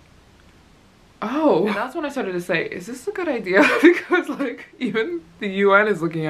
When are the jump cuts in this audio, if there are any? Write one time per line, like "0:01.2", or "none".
0:02.0

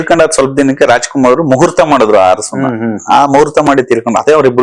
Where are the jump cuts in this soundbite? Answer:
none

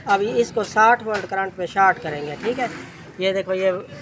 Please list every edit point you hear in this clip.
none

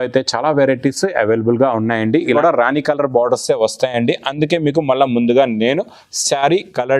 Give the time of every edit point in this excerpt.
0:02.3

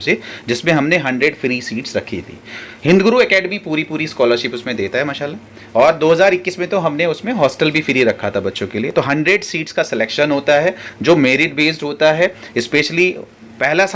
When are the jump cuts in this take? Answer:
none

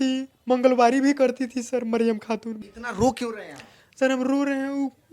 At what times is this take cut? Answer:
0:02.5

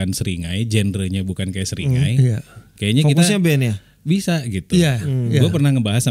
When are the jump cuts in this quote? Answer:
none

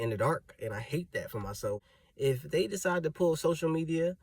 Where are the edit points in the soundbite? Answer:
0:01.9

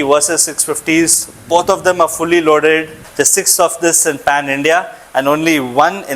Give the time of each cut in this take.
0:03.1

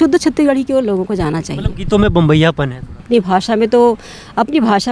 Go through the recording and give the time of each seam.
0:03.1

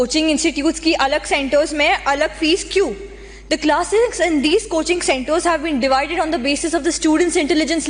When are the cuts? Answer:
none

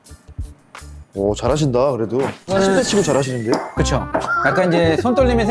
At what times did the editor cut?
0:01.1

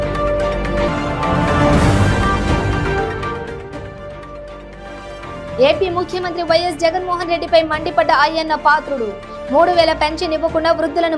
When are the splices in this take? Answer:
none

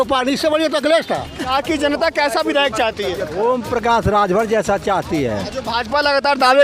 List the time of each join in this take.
0:01.5
0:05.5

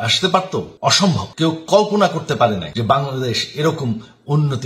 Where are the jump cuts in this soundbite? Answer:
0:01.0
0:02.7

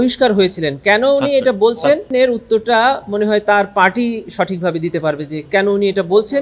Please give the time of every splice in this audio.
0:02.1

